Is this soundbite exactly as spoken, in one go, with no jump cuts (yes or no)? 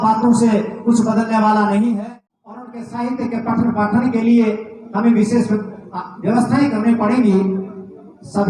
no